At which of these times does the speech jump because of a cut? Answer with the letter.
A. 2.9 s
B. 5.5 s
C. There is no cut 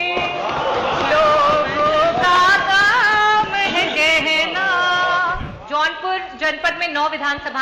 B